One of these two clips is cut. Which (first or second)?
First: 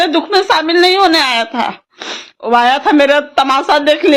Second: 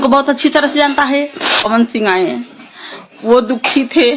second